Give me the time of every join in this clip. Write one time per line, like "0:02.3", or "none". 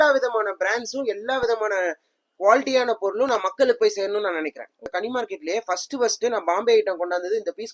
0:04.9